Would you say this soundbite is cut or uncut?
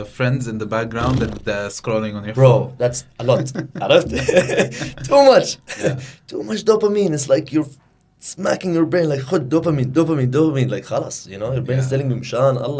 uncut